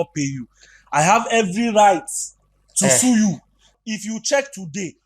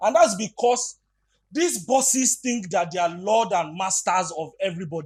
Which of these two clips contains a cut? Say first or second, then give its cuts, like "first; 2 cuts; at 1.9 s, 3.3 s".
first; 1 cut; at 3.7 s